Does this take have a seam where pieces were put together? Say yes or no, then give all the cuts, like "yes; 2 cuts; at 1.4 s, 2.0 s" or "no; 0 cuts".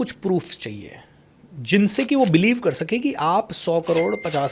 no; 0 cuts